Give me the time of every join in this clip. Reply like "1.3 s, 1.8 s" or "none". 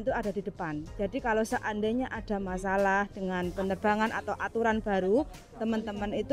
none